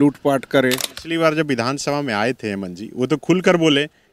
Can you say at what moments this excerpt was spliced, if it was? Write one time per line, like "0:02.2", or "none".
0:00.9